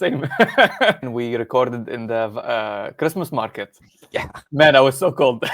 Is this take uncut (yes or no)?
no